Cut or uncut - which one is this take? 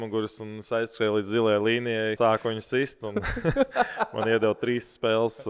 cut